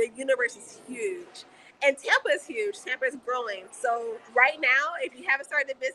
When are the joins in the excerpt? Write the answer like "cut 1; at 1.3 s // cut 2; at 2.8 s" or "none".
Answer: cut 1; at 4.0 s

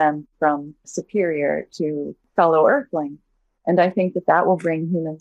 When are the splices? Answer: cut 1; at 1.0 s // cut 2; at 2.2 s

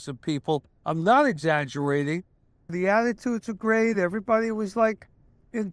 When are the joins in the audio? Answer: cut 1; at 2.7 s

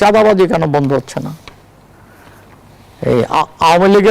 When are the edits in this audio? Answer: none

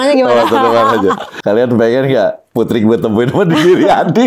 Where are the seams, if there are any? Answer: cut 1; at 1.3 s

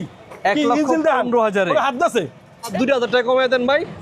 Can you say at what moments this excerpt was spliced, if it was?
cut 1; at 2.7 s

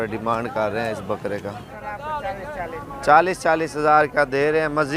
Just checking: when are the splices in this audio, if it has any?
cut 1; at 1.6 s

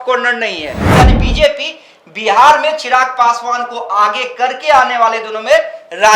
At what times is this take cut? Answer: cut 1; at 0.9 s

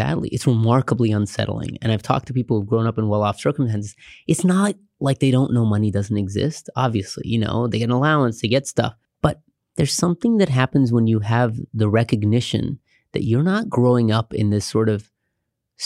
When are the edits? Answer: cut 1; at 9.0 s

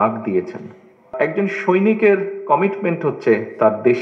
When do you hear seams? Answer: cut 1; at 1.1 s

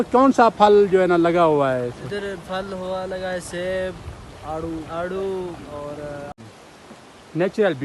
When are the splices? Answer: cut 1; at 6.4 s

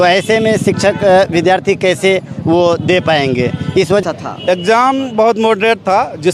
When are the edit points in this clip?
cut 1; at 4.0 s

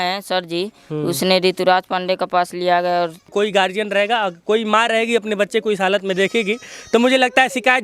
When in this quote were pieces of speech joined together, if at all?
cut 1; at 3.3 s

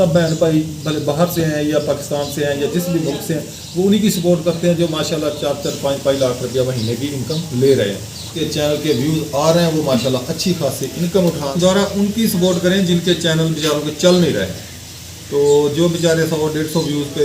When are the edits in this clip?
cut 1; at 8.3 s // cut 2; at 11.5 s

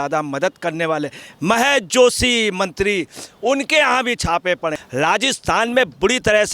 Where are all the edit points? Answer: cut 1; at 4.8 s

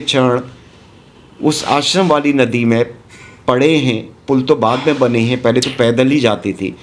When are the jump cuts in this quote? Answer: none

